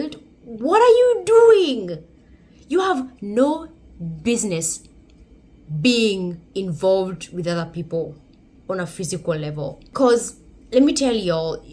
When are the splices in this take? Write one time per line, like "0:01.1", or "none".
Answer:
none